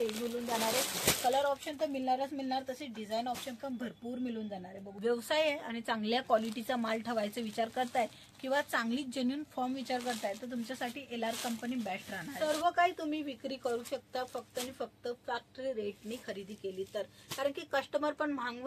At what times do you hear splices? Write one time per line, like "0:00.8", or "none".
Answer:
0:04.8
0:12.3